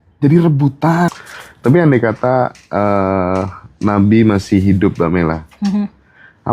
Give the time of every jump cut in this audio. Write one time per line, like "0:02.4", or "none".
0:01.1